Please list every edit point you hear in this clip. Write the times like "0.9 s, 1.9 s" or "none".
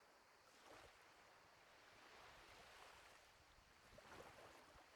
none